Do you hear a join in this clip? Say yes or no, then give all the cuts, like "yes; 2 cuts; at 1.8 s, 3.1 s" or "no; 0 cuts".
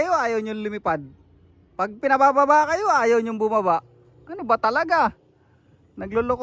no; 0 cuts